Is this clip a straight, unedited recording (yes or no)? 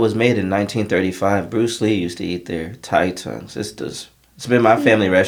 yes